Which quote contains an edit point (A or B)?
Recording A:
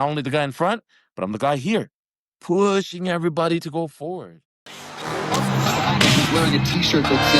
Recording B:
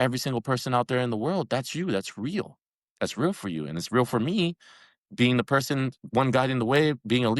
A